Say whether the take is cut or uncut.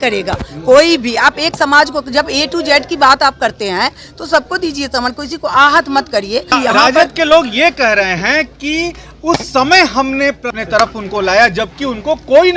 cut